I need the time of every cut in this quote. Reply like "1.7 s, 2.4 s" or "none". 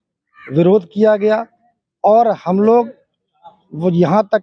none